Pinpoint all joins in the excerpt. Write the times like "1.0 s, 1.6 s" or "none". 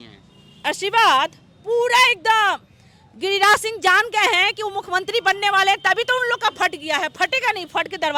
none